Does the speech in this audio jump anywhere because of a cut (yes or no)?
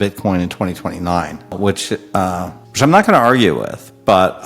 yes